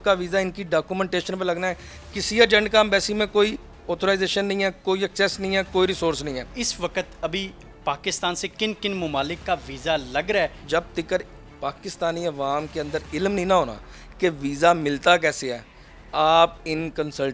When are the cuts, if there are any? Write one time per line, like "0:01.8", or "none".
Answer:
0:06.6
0:10.6

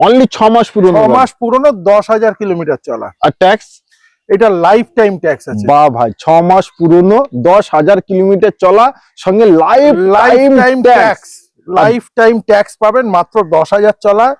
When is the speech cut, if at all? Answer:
none

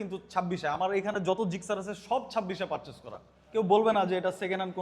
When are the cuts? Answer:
0:03.5

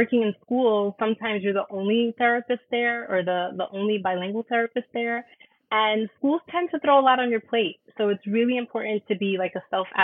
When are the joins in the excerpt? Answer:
none

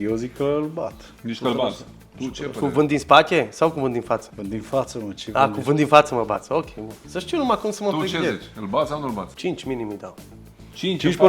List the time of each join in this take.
0:01.1
0:04.3
0:09.3

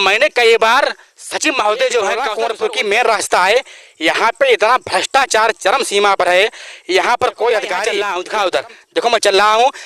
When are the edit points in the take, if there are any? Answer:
0:02.3
0:07.9

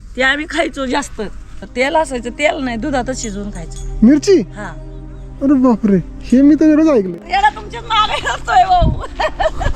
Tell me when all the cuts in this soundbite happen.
0:01.6
0:07.1

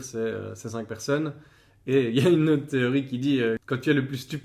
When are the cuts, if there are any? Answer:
none

